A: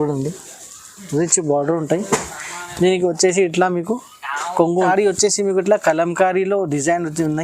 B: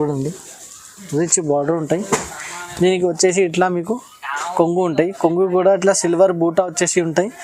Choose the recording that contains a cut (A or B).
A